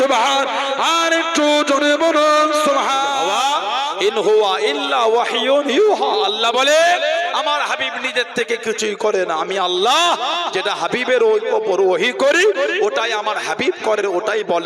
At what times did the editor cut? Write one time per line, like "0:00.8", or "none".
0:03.2